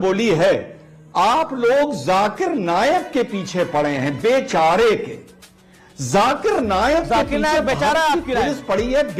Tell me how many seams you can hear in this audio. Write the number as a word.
zero